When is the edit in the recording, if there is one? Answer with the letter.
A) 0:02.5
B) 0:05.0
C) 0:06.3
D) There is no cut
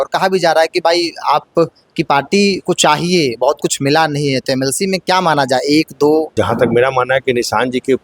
C